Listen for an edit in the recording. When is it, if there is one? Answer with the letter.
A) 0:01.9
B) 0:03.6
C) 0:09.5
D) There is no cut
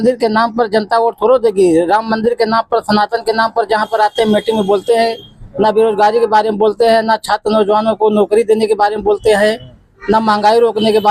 D